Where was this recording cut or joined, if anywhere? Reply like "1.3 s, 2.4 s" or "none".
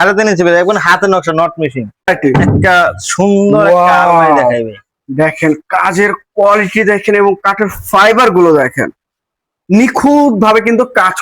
2.1 s